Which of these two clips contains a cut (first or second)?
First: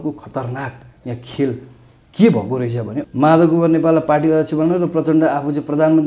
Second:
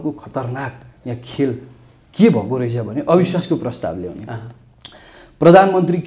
first